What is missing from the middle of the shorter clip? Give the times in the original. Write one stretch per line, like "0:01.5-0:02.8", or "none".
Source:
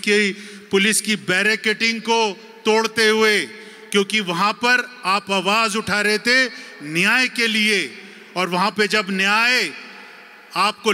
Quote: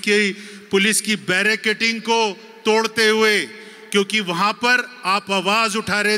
none